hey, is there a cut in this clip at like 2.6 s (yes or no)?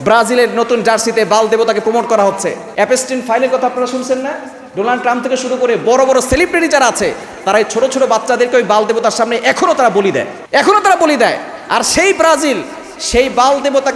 yes